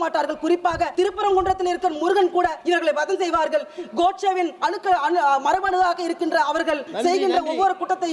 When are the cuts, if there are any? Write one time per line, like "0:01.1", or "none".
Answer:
0:00.9
0:02.6
0:04.5
0:06.9